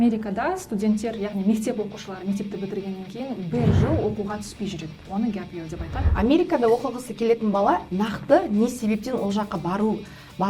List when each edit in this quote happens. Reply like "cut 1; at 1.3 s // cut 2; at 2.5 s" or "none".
cut 1; at 6.1 s